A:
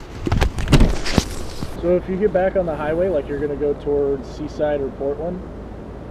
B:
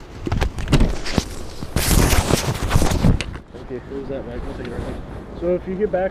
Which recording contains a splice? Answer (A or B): A